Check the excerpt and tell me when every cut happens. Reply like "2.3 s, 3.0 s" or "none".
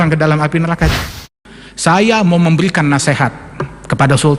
1.0 s